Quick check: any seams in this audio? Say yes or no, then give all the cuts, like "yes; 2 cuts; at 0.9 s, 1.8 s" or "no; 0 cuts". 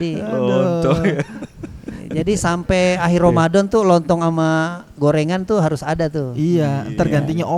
no; 0 cuts